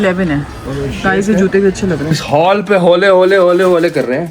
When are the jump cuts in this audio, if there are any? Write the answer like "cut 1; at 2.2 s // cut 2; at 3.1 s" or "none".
cut 1; at 2.2 s